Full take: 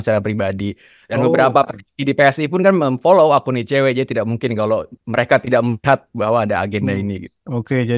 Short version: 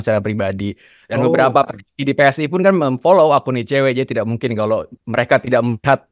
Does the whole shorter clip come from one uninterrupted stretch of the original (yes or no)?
yes